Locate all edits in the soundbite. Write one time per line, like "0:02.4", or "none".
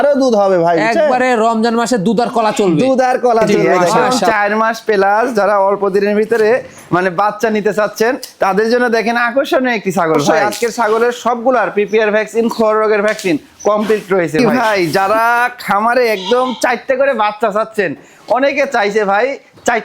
0:04.0
0:10.4
0:14.4